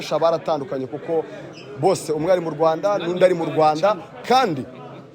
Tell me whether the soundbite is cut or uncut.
uncut